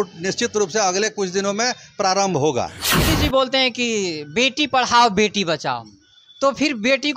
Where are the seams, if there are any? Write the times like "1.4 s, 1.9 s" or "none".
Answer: 3.0 s